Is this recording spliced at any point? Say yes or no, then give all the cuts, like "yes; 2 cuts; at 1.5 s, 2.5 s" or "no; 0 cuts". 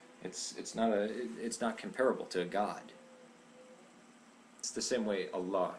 no; 0 cuts